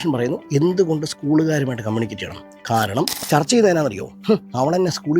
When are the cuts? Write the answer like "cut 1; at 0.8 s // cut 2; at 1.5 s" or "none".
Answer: cut 1; at 3.1 s

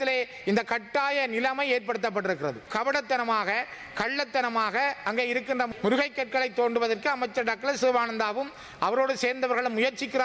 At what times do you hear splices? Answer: cut 1; at 2.7 s

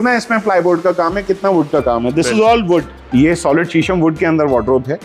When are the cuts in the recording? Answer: cut 1; at 3.0 s

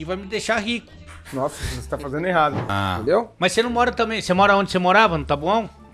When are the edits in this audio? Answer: cut 1; at 2.6 s

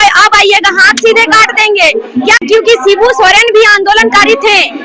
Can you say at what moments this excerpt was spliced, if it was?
cut 1; at 2.4 s

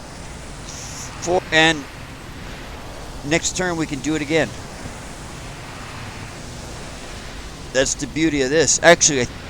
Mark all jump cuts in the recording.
cut 1; at 1.4 s

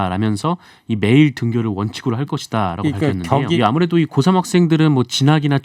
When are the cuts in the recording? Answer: cut 1; at 3.6 s

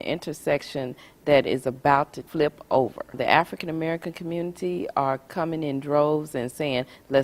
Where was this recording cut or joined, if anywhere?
cut 1; at 2.2 s // cut 2; at 3.2 s

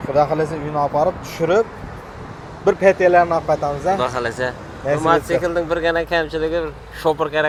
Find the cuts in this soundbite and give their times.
none

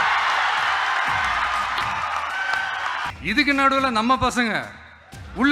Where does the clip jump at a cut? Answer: cut 1; at 3.1 s

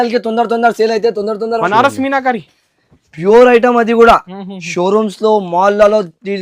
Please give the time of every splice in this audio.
cut 1; at 1.6 s

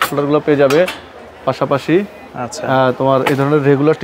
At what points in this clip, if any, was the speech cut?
none

